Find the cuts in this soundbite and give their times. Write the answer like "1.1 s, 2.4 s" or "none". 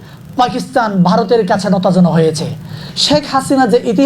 2.9 s